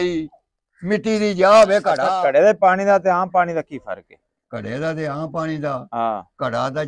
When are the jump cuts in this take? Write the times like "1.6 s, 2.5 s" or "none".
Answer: 2.0 s